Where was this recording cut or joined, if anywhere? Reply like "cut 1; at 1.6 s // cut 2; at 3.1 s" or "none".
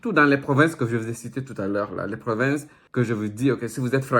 cut 1; at 2.8 s